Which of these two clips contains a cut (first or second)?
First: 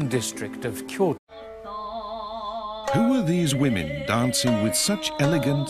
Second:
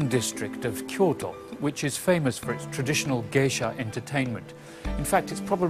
second